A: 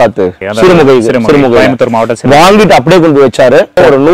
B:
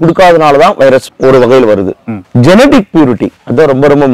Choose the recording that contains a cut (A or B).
B